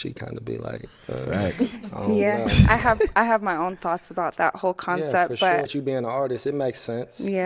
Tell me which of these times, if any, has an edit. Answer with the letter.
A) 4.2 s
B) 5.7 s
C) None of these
B